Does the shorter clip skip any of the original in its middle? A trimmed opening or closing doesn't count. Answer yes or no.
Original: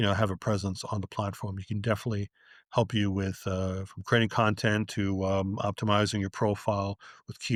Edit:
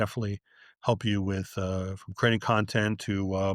no